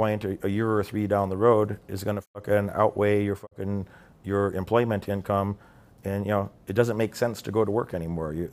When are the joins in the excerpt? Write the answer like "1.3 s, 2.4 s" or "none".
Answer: none